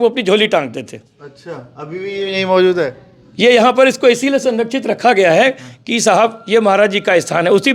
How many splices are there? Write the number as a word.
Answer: zero